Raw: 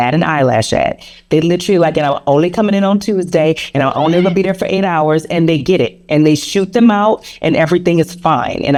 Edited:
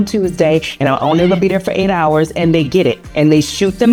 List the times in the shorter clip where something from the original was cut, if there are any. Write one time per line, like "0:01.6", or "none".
none